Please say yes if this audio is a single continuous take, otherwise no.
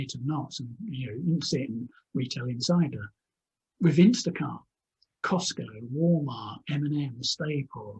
yes